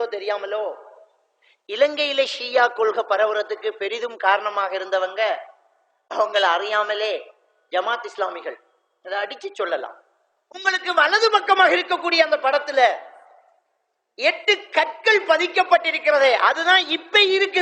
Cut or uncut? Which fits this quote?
cut